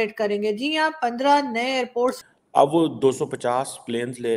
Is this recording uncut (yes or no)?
no